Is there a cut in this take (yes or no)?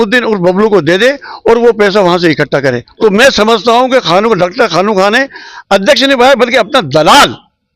yes